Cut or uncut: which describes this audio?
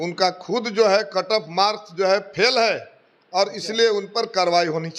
uncut